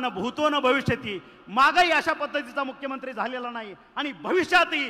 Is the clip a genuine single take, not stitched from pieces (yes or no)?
yes